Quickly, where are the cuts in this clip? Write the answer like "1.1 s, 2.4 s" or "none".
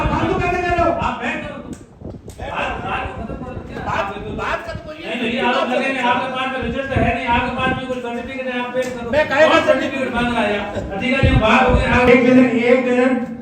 12.1 s